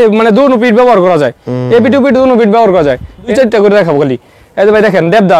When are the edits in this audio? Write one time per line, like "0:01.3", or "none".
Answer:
0:03.3